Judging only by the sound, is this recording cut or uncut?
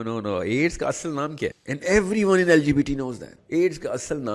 cut